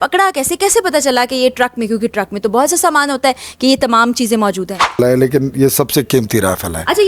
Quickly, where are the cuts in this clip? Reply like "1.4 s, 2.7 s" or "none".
5.0 s